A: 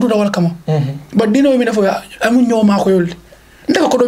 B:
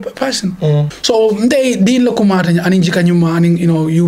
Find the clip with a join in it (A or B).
B